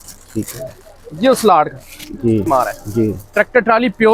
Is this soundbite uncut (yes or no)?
no